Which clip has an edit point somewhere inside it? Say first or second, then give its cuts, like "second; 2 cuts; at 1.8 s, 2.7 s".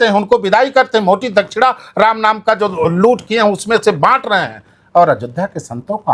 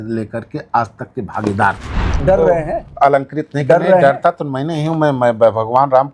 second; 1 cut; at 2.1 s